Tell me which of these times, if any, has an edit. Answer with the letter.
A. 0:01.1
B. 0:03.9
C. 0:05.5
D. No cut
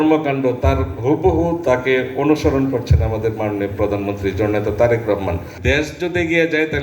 C